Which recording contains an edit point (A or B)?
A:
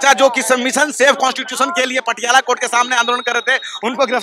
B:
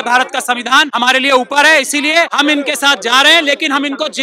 B